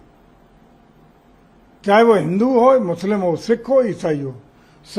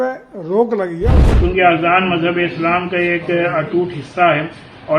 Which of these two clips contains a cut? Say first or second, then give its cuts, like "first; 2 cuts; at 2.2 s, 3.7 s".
second; 1 cut; at 1.2 s